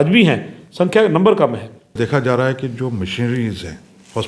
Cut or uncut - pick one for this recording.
cut